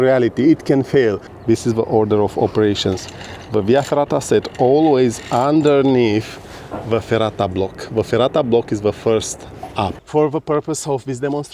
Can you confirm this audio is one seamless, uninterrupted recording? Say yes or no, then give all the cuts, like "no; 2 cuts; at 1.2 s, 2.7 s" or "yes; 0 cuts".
no; 2 cuts; at 1.3 s, 10.0 s